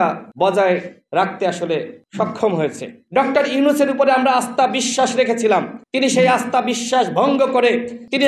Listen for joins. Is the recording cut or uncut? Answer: cut